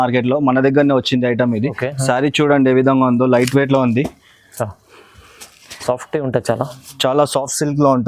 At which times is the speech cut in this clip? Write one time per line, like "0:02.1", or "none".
none